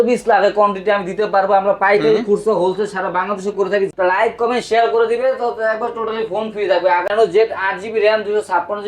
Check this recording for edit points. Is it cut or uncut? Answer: cut